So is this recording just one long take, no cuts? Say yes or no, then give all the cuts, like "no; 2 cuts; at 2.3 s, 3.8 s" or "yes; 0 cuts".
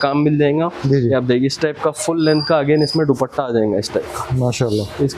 yes; 0 cuts